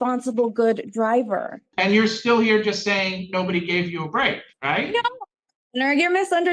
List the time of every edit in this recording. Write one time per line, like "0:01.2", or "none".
0:01.6
0:04.5